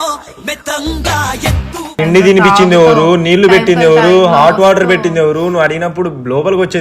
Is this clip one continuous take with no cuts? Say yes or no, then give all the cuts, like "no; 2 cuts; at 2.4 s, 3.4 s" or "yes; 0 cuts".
no; 1 cut; at 2.0 s